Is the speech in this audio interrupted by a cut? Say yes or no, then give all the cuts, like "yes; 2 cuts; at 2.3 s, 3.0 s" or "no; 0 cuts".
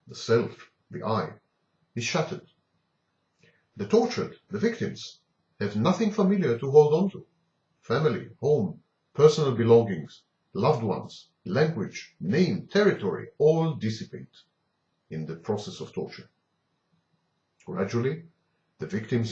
yes; 1 cut; at 13.5 s